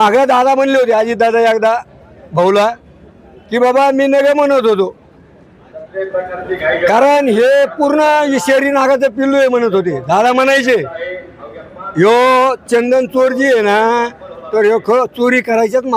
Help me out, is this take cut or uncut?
uncut